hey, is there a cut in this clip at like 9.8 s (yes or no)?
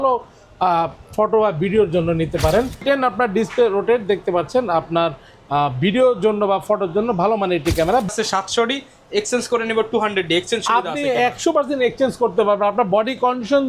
no